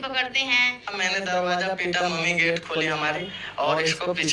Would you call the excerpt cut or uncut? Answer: cut